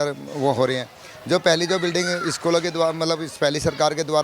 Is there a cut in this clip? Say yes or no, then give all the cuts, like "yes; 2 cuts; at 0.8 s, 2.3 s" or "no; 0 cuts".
no; 0 cuts